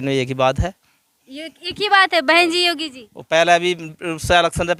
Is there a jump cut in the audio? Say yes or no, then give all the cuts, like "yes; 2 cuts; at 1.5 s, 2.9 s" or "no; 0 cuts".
no; 0 cuts